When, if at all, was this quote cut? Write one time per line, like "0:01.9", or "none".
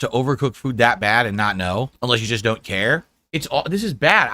0:01.9
0:03.1